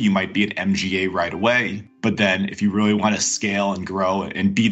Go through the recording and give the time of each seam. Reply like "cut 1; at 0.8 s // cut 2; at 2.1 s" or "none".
cut 1; at 1.9 s